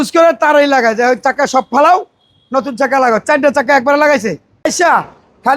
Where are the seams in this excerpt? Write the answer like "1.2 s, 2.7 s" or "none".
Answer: 4.6 s